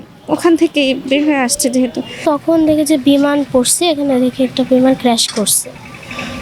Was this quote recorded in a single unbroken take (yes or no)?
no